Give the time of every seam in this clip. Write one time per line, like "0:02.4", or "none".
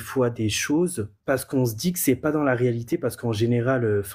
0:01.1